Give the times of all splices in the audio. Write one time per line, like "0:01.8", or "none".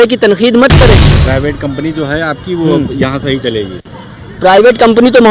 0:01.1